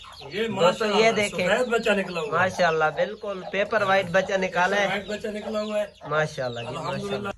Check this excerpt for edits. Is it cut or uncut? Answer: uncut